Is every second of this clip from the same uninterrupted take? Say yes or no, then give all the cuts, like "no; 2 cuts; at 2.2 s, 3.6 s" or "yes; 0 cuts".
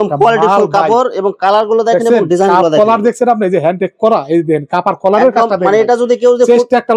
yes; 0 cuts